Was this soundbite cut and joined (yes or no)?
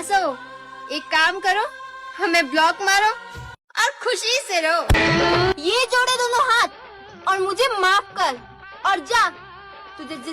yes